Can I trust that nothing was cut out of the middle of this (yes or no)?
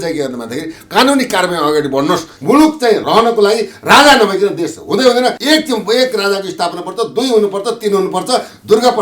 no